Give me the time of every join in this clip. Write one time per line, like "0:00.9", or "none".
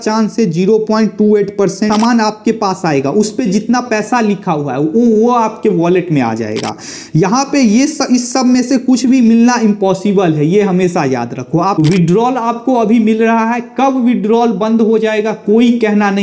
0:01.9
0:11.8